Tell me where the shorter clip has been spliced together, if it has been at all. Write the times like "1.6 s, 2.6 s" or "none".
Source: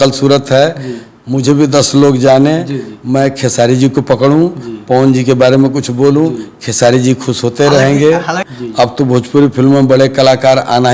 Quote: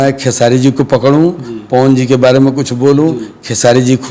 none